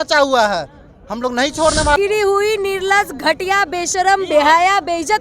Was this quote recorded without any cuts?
no; 1 cut; at 1.9 s

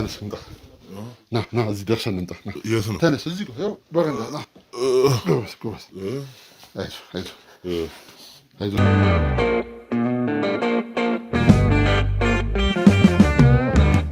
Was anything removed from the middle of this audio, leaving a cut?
yes; 1 cut; at 8.7 s

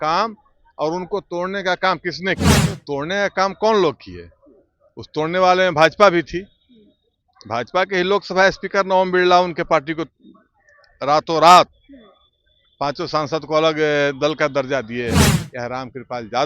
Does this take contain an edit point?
yes; 2 cuts; at 2.7 s, 15.4 s

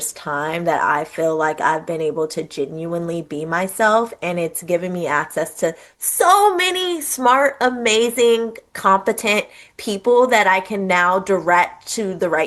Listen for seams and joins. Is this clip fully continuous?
yes; 0 cuts

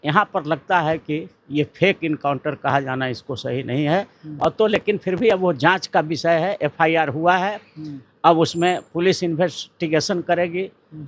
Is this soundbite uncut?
yes; 0 cuts

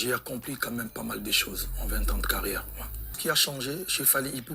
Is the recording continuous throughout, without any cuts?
no; 1 cut; at 3.2 s

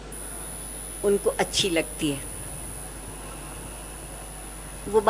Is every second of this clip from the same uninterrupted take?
yes; 0 cuts

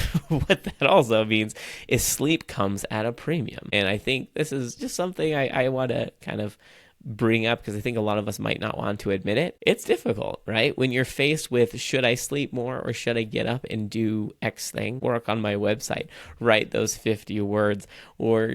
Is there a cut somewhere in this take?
yes; 3 cuts; at 3.6 s, 9.6 s, 15.0 s

